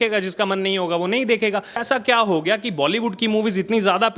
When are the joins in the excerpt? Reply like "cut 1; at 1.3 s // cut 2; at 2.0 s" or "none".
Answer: cut 1; at 1.8 s